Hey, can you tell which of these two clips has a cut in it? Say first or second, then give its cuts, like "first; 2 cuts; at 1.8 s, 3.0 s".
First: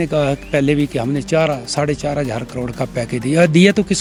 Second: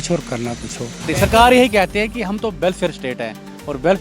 second; 1 cut; at 1.1 s